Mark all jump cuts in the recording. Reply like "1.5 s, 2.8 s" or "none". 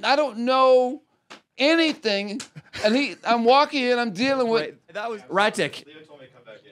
4.9 s